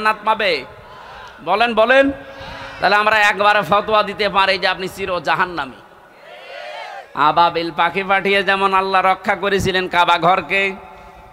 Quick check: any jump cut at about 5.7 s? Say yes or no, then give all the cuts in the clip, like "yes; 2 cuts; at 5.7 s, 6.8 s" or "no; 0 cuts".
no; 1 cut; at 7.0 s